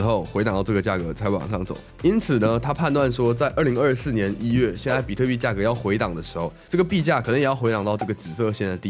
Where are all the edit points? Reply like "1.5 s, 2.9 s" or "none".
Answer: 1.8 s

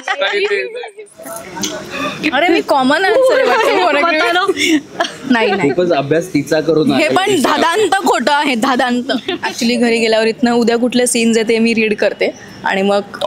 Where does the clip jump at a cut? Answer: 1.5 s, 9.4 s

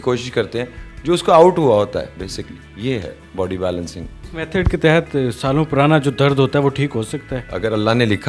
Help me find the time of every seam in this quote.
none

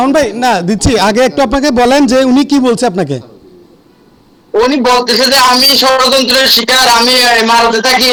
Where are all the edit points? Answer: none

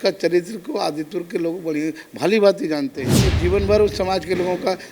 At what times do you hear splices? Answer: none

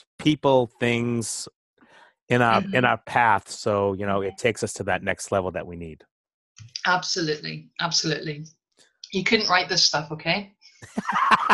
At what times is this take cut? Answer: none

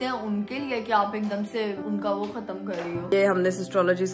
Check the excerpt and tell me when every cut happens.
1.8 s, 3.1 s

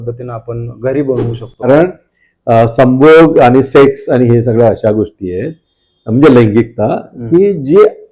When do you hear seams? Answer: 1.7 s

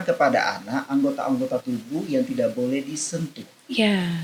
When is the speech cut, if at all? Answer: none

